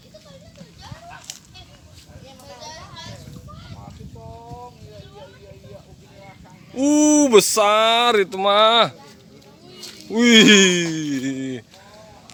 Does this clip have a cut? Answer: no; 0 cuts

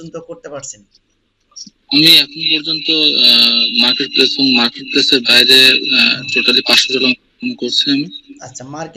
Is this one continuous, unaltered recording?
yes; 0 cuts

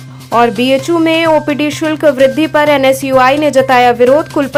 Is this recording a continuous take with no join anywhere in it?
yes; 0 cuts

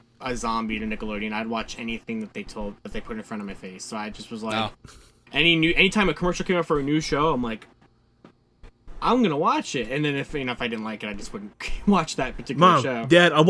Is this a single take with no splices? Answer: no; 1 cut; at 12.5 s

